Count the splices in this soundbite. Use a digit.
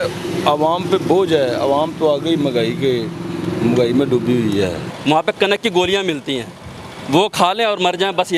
1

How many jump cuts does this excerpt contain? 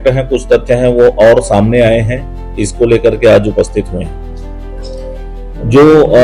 0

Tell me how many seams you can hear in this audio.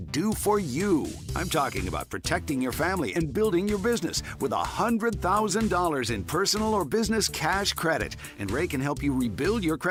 0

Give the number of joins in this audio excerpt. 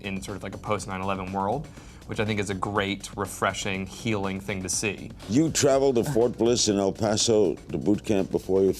1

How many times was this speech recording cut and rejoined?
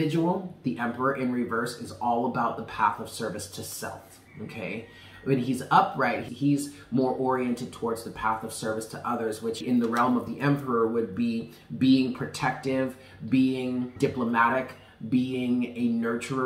3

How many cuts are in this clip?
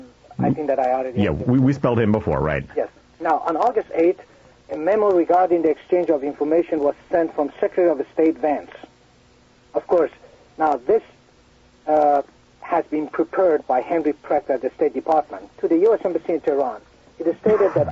1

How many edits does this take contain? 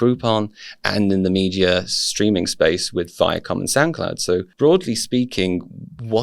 1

